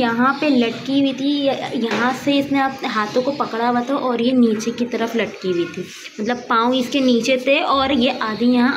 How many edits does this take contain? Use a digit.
0